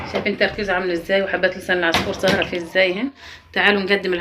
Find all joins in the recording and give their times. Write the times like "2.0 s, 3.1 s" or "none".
3.2 s